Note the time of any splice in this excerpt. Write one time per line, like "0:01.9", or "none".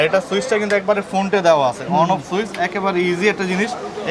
none